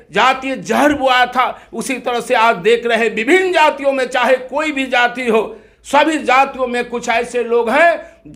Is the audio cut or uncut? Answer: uncut